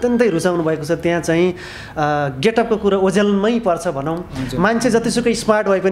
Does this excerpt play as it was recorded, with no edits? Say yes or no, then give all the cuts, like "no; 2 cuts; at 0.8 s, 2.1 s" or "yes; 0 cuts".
yes; 0 cuts